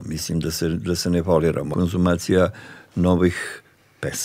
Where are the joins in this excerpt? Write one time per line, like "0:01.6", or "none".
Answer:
0:01.7